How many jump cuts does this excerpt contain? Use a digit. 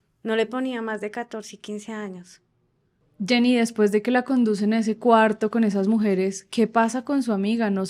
0